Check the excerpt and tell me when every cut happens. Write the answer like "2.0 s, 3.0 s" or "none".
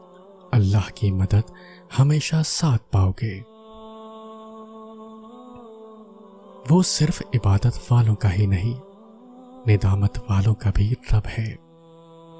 3.9 s, 6.7 s